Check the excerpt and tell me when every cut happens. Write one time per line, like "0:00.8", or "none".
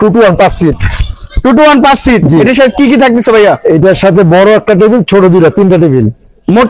none